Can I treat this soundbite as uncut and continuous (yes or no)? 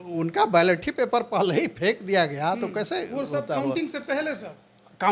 yes